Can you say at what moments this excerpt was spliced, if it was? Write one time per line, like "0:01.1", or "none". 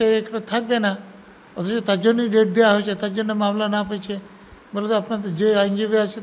none